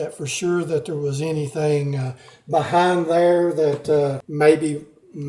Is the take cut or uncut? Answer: cut